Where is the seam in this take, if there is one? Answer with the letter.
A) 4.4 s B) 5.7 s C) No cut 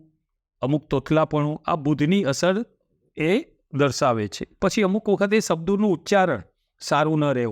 A